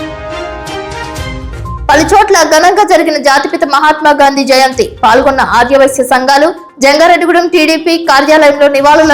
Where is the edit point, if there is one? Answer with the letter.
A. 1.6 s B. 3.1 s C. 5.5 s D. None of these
D